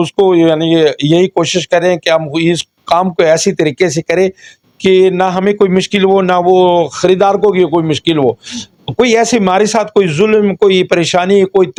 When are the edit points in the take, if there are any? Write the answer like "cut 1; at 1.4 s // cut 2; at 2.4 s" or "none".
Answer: none